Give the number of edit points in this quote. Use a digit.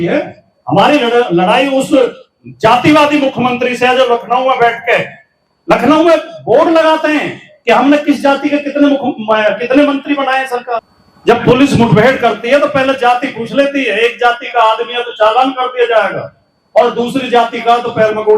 1